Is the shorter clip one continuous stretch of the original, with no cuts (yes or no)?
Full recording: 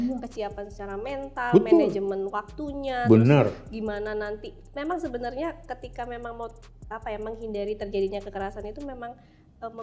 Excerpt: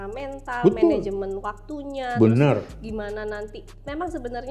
yes